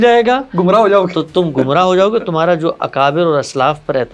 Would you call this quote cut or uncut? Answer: uncut